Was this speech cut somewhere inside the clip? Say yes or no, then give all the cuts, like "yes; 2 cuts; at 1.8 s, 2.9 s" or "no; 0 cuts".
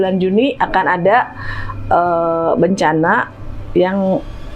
no; 0 cuts